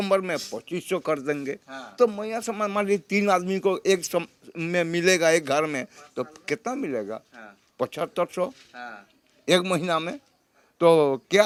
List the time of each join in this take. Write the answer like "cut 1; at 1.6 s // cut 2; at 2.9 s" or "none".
none